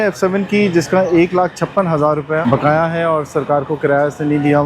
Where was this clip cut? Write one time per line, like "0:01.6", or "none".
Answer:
0:02.4